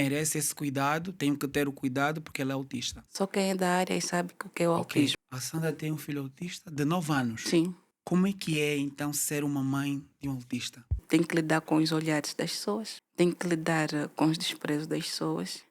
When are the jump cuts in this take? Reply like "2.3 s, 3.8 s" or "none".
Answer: 3.0 s, 5.1 s, 11.0 s